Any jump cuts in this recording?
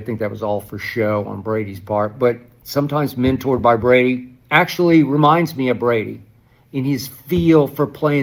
no; 0 cuts

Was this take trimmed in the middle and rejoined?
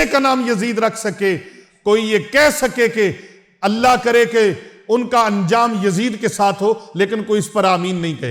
no; 0 cuts

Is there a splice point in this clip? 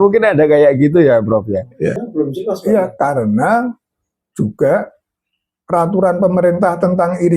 yes; 1 cut; at 2.0 s

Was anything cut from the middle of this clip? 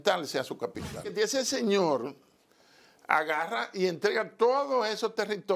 yes; 1 cut; at 1.1 s

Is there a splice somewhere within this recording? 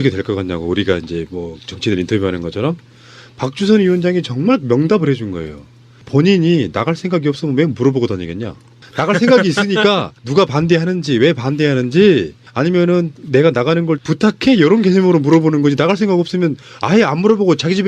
yes; 1 cut; at 13.9 s

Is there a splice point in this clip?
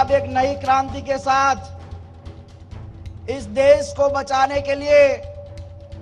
no; 0 cuts

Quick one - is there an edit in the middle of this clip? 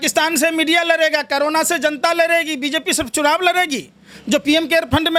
no; 0 cuts

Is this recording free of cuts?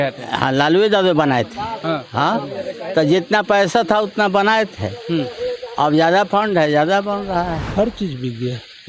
no; 1 cut; at 7.6 s

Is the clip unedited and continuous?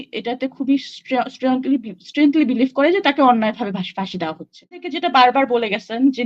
no; 1 cut; at 4.9 s

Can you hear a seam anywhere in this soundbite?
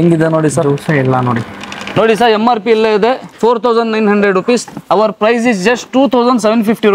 yes; 1 cut; at 1.8 s

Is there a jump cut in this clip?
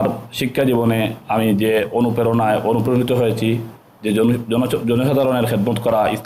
no; 0 cuts

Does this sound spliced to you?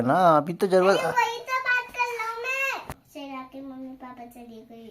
yes; 1 cut; at 3.0 s

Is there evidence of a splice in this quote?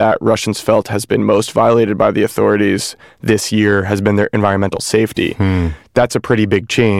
no; 0 cuts

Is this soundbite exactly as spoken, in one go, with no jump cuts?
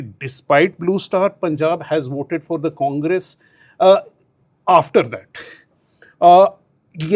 yes; 0 cuts

